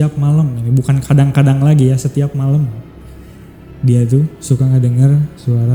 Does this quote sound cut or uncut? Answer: uncut